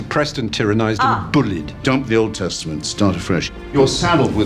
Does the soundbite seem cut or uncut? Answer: cut